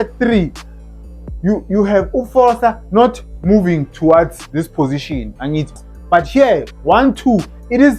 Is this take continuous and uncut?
no; 1 cut; at 5.8 s

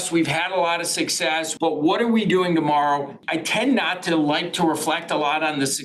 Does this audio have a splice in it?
yes; 2 cuts; at 1.5 s, 3.2 s

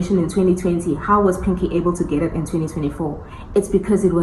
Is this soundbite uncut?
yes; 0 cuts

